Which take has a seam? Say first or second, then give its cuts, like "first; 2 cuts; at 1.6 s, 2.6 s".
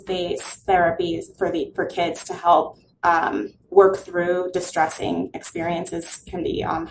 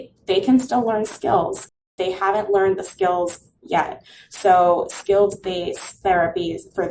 second; 1 cut; at 1.7 s